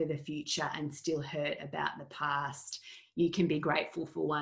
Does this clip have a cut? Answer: no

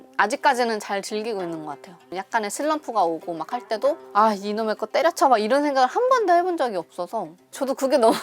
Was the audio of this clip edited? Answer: no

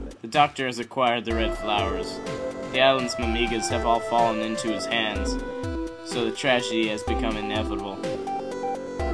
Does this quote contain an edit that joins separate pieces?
yes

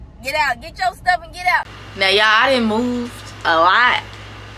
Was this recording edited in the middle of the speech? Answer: yes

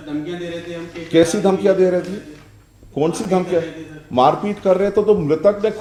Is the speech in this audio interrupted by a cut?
no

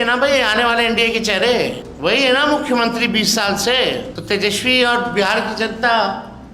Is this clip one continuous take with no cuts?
no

